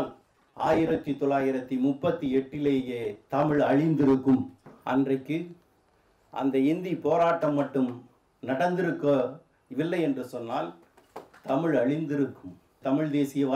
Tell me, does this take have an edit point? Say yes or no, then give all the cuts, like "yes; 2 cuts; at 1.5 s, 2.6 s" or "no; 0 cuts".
yes; 2 cuts; at 4.7 s, 12.8 s